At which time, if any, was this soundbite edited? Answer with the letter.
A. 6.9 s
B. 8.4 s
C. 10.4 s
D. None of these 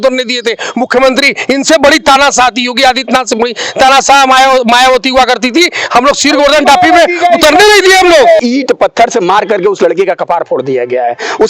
B